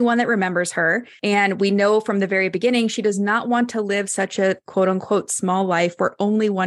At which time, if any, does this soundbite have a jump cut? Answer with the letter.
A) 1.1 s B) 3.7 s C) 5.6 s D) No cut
A